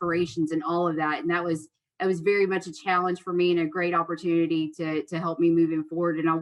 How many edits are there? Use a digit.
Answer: 0